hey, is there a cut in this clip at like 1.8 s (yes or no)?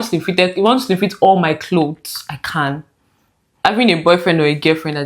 no